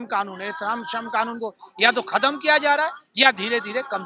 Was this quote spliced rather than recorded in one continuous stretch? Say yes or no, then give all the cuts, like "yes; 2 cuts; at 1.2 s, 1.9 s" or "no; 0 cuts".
no; 0 cuts